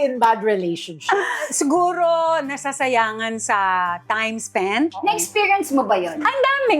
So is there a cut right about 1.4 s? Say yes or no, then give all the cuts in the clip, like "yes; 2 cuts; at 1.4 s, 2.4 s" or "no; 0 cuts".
yes; 2 cuts; at 1.4 s, 5.0 s